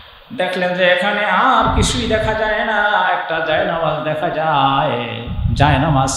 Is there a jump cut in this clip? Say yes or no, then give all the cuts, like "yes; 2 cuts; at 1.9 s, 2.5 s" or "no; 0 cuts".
no; 0 cuts